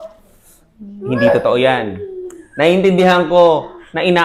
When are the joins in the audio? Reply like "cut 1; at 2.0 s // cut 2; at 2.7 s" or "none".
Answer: none